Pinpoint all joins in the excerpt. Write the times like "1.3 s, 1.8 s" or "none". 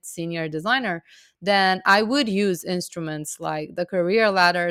none